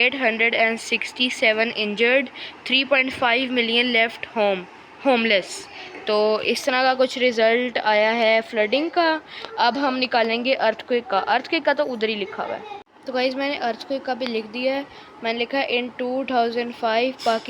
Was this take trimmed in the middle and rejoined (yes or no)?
yes